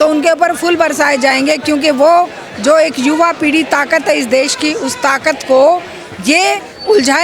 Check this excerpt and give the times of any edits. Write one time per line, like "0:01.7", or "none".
none